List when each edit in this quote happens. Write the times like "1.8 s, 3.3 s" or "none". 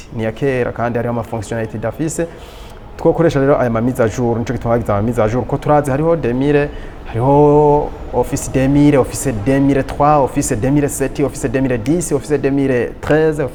none